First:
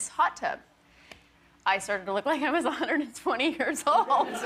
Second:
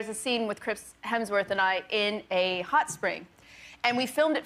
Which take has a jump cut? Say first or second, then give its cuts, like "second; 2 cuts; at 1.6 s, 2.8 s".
first; 1 cut; at 1.1 s